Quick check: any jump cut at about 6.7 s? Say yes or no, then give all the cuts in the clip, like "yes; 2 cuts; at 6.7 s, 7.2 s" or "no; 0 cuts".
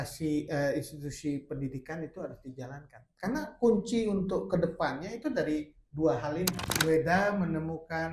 yes; 1 cut; at 6.7 s